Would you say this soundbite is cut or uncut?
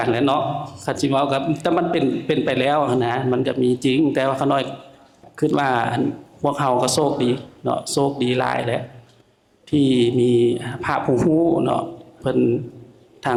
uncut